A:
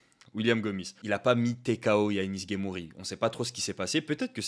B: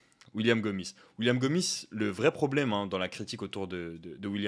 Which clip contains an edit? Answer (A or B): A